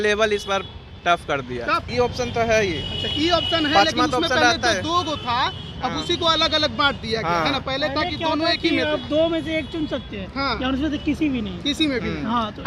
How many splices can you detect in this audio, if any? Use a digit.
1